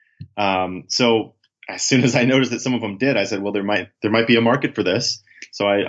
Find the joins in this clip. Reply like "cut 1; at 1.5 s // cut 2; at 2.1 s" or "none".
cut 1; at 3.9 s